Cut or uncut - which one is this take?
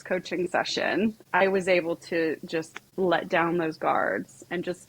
cut